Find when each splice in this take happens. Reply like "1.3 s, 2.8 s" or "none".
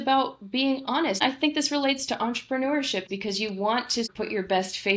1.2 s, 3.1 s, 4.1 s